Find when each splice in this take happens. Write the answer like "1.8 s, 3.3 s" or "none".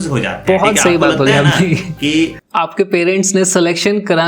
2.4 s